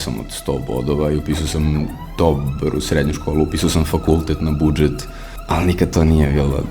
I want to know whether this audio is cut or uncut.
uncut